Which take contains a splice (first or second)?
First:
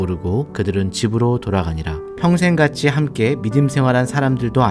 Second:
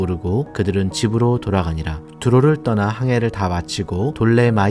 second